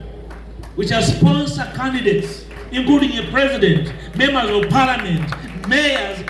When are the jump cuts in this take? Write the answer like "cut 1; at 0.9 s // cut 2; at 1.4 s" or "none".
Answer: none